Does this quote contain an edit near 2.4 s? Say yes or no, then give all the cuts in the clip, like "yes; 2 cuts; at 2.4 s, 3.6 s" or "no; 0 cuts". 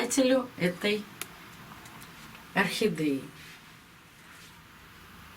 no; 1 cut; at 4.4 s